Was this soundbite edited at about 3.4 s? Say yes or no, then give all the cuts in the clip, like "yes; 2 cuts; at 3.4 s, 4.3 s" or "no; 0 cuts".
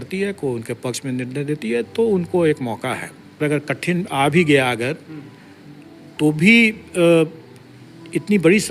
yes; 1 cut; at 3.4 s